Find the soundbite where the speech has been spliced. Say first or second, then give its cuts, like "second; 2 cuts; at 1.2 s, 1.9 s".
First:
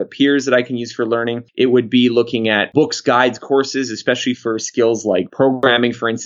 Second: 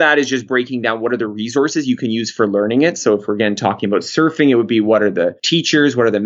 first; 2 cuts; at 1.4 s, 2.7 s